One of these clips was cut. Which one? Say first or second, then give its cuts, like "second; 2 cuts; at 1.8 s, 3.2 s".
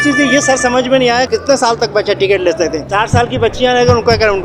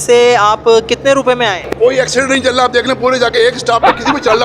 second; 1 cut; at 1.6 s